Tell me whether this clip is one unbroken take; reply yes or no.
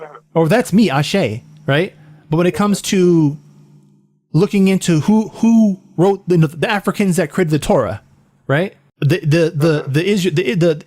yes